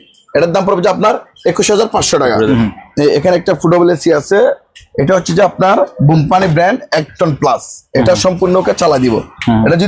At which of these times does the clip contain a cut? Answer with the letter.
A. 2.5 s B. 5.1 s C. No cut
A